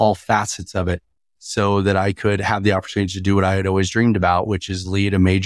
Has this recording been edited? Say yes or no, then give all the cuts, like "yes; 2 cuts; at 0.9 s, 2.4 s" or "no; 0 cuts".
no; 0 cuts